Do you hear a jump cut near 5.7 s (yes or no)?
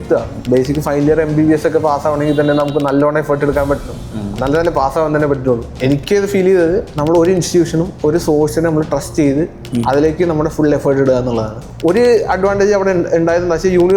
yes